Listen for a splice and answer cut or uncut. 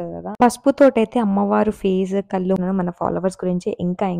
cut